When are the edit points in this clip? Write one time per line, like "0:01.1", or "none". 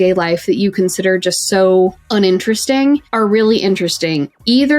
0:02.0
0:03.1